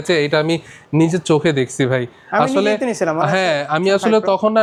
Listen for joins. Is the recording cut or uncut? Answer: uncut